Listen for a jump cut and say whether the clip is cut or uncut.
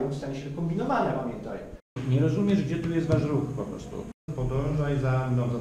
cut